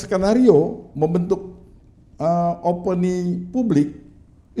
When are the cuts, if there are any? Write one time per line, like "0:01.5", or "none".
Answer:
none